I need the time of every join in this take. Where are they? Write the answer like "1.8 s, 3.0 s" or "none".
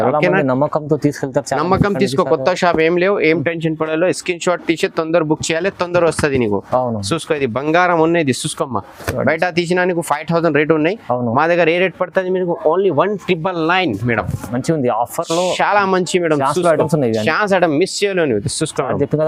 none